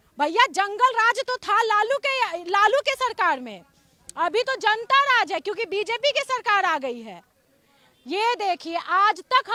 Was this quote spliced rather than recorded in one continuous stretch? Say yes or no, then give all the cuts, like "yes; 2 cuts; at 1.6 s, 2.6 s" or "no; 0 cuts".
no; 0 cuts